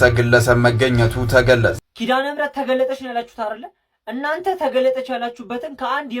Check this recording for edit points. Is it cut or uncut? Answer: cut